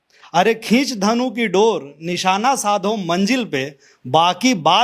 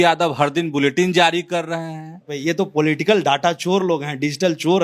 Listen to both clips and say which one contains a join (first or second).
second